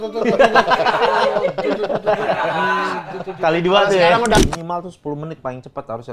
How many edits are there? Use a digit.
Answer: 1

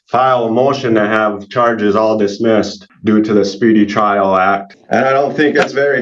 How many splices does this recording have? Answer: 2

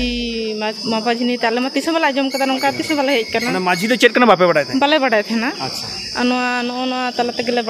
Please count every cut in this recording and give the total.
0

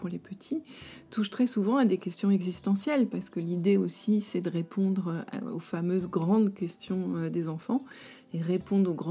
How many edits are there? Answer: 0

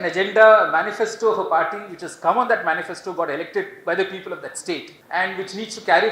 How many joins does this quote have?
1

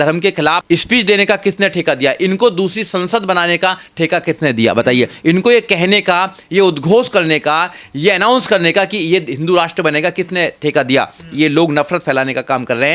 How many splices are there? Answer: 0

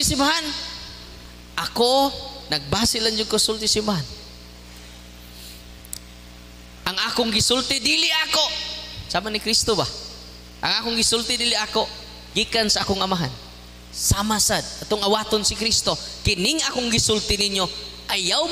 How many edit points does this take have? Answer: 0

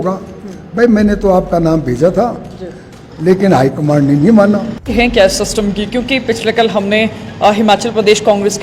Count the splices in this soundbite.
1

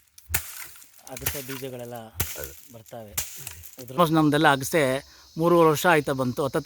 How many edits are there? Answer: 1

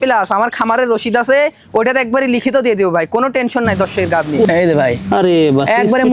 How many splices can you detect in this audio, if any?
1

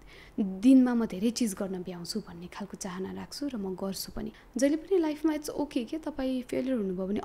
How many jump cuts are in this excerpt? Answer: 1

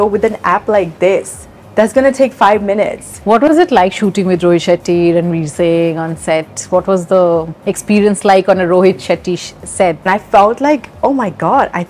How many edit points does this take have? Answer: 2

